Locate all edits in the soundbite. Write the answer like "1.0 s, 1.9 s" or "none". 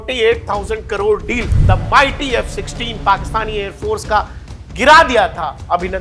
1.5 s